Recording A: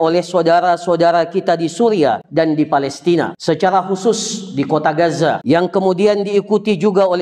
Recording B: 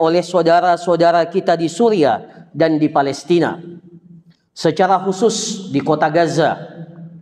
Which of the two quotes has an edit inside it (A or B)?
A